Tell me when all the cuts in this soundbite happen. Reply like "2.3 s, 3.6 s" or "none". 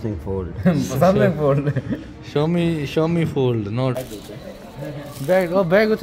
4.0 s